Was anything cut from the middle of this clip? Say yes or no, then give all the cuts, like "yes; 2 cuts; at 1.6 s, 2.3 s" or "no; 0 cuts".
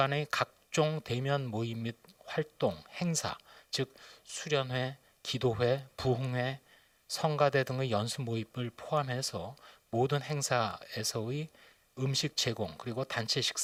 no; 0 cuts